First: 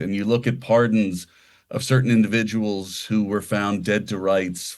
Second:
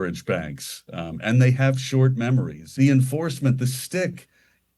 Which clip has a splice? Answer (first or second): second